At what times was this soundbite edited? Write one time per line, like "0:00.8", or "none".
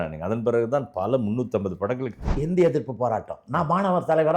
0:02.4